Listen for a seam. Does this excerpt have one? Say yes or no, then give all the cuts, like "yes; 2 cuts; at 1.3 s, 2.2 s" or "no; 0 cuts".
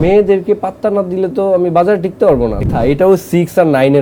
yes; 1 cut; at 2.6 s